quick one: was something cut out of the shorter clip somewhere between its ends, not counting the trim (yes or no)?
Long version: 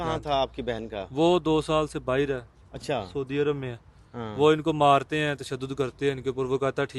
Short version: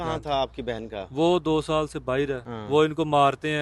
yes